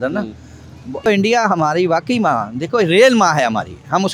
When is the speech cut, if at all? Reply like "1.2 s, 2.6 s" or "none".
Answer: 1.0 s